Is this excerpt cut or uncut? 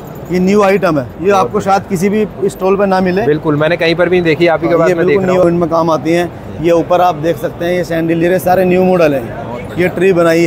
cut